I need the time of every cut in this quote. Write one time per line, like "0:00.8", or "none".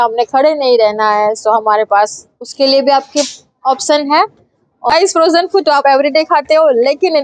0:04.8